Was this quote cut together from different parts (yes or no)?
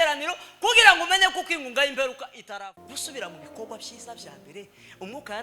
yes